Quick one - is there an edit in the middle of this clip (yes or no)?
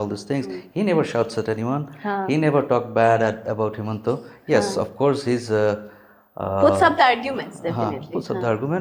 no